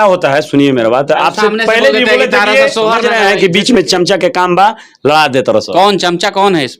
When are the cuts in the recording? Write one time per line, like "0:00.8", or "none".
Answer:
0:03.1